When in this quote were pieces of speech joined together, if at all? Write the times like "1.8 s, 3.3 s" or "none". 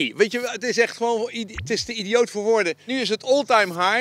2.9 s